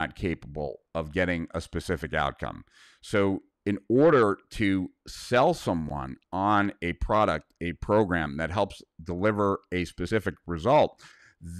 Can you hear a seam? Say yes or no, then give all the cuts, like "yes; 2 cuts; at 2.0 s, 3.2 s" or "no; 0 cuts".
no; 0 cuts